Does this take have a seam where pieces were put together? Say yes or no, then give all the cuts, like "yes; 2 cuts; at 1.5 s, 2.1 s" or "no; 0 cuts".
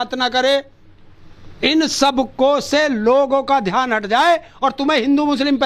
no; 0 cuts